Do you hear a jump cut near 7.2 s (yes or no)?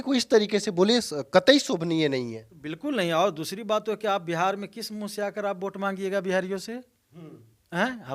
no